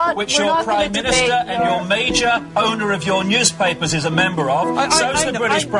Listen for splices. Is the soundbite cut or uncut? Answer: uncut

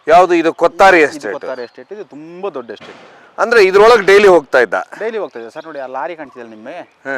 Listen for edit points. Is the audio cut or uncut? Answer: uncut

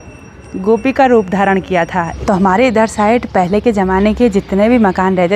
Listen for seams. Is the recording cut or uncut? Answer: cut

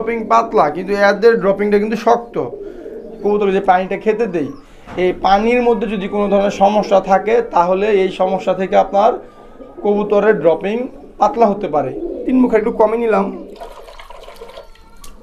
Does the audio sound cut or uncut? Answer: cut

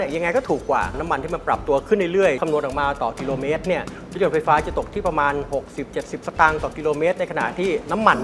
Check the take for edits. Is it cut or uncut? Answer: cut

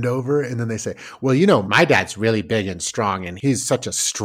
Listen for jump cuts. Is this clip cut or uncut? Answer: cut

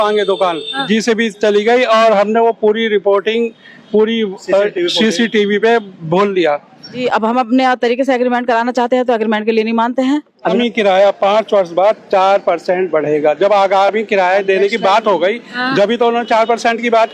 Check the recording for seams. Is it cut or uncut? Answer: cut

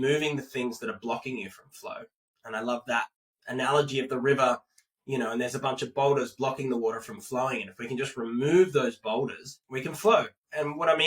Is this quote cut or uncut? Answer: uncut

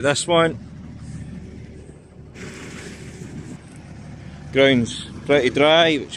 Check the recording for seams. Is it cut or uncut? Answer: uncut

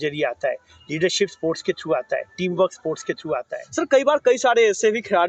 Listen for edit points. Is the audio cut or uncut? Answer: cut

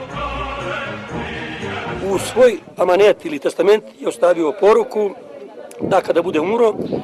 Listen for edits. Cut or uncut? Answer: cut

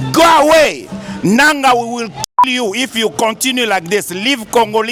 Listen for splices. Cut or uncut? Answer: uncut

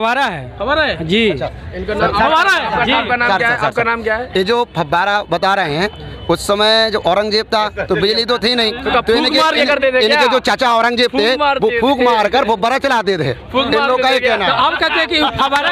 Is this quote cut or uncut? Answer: uncut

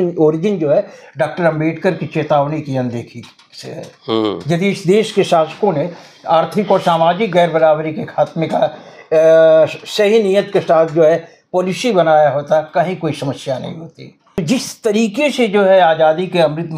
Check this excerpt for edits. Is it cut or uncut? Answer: cut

